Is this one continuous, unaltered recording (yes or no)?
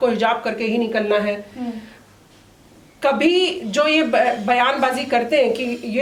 yes